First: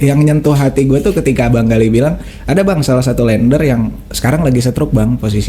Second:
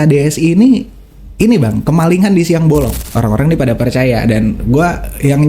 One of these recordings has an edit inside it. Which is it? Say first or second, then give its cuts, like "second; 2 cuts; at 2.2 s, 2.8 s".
second; 1 cut; at 3.0 s